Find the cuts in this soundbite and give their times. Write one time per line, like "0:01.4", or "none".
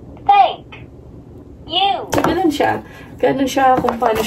0:02.1